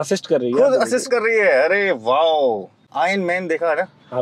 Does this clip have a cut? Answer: yes; 1 cut; at 2.8 s

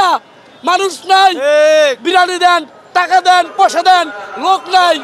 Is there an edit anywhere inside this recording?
no; 0 cuts

